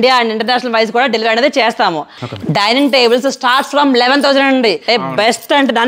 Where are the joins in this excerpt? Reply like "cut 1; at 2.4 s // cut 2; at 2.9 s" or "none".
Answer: cut 1; at 2.2 s // cut 2; at 4.8 s